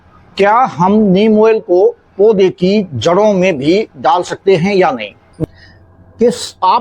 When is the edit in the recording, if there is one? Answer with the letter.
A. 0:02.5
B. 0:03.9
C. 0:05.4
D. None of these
C